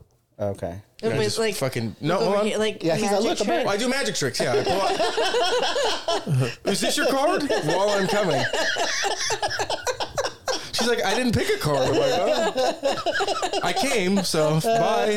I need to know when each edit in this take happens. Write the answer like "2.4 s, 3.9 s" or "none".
none